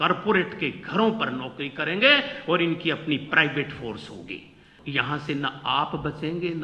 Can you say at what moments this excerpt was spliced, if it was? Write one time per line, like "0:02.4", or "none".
0:04.7